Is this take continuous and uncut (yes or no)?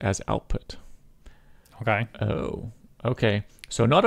yes